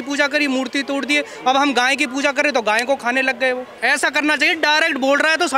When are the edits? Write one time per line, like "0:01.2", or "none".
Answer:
0:03.8

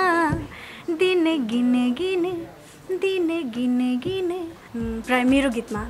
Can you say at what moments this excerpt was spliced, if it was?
0:04.6

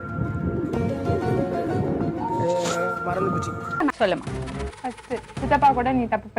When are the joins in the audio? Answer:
0:03.9

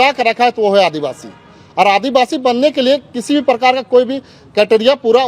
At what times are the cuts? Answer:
none

